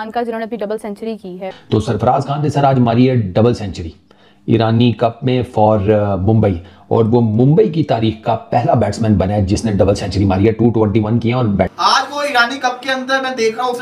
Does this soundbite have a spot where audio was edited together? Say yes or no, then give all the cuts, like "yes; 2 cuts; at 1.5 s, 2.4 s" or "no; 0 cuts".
yes; 2 cuts; at 1.4 s, 11.7 s